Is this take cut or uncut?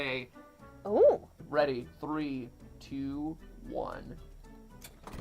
cut